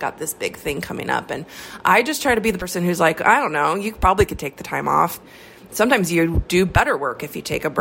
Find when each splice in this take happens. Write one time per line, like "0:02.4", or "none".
0:05.2